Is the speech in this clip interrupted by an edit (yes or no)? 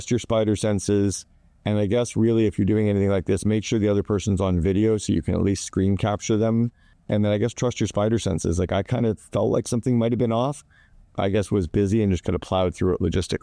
no